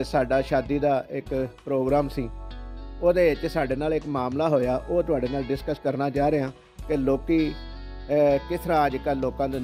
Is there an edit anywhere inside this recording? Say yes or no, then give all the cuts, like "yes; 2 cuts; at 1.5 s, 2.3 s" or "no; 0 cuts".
no; 0 cuts